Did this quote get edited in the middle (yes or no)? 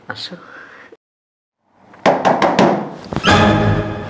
yes